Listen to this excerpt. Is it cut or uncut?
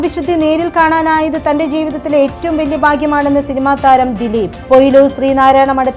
uncut